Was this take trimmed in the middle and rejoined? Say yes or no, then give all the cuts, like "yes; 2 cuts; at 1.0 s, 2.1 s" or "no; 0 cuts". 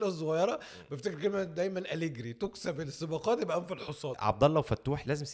yes; 1 cut; at 4.1 s